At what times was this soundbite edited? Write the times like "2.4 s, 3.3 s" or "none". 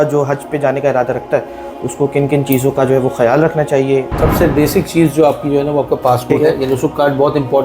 4.1 s, 6.3 s